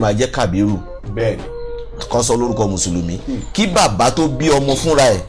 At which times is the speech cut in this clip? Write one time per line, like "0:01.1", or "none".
none